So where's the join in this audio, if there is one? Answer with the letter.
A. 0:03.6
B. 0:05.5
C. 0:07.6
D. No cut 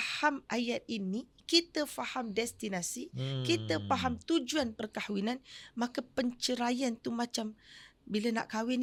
D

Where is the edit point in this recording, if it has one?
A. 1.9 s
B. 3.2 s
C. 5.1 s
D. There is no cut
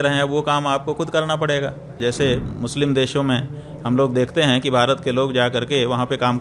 A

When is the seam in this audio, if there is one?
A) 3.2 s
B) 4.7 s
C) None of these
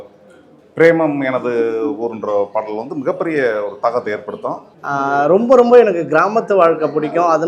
B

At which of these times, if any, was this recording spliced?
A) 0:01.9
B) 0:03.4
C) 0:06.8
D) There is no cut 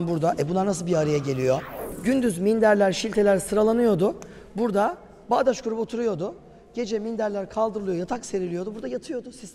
A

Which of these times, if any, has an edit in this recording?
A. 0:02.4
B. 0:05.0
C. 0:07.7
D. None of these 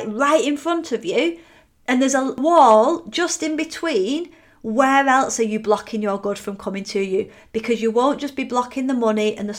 A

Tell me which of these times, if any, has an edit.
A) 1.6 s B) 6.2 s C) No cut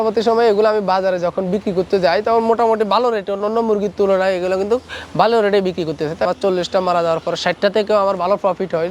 B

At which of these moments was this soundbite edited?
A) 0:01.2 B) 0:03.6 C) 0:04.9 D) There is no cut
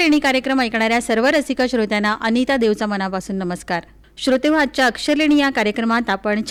D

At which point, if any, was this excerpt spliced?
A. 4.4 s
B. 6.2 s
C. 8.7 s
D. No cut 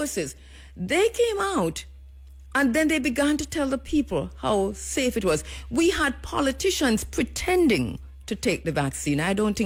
D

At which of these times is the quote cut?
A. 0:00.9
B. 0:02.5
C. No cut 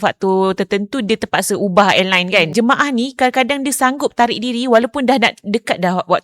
B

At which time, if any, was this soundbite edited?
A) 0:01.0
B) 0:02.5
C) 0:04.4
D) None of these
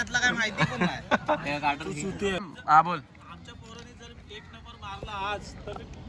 B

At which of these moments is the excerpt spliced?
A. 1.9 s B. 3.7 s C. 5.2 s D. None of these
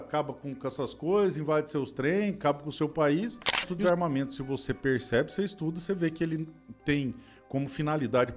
B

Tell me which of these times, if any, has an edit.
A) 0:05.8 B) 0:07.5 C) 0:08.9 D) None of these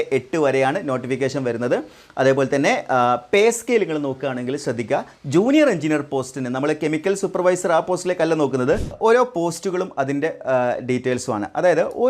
C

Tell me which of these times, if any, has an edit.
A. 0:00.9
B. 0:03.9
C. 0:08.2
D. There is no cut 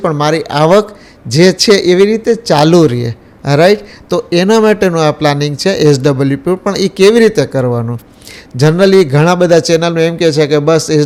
D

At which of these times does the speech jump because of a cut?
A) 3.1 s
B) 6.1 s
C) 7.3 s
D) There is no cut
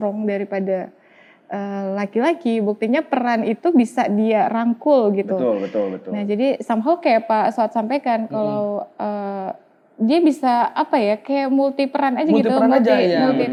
D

